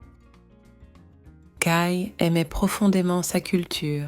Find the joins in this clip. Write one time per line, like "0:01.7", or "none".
0:01.5